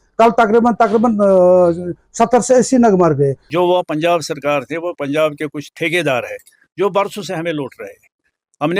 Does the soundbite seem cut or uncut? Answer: cut